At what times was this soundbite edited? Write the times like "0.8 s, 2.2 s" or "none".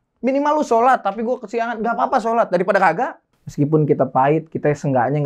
3.1 s